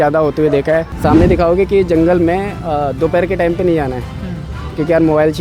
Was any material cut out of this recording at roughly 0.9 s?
yes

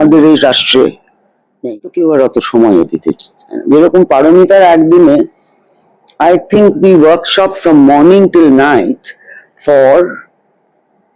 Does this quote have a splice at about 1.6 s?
yes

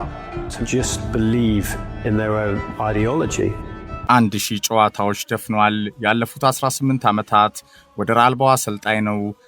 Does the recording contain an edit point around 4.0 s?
yes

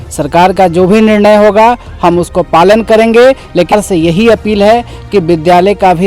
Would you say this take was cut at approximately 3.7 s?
yes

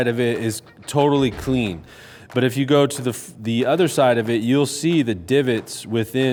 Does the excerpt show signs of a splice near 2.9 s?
no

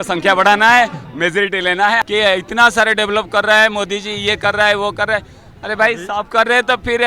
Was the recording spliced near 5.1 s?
no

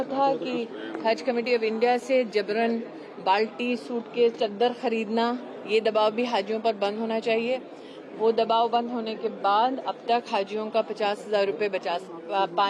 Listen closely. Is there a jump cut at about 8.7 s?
no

